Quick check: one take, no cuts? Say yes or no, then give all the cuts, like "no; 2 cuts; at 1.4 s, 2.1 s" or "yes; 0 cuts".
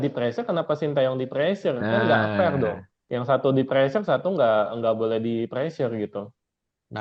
yes; 0 cuts